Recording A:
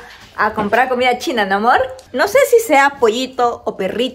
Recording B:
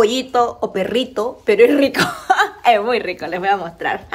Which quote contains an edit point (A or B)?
A